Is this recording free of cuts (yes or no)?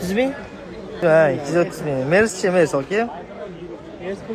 no